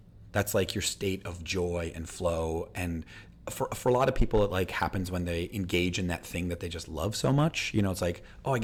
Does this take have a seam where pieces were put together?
no; 0 cuts

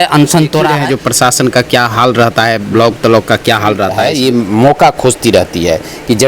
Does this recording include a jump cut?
yes; 2 cuts; at 1.1 s, 3.9 s

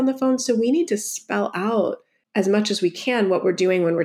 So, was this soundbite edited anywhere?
yes; 1 cut; at 2.1 s

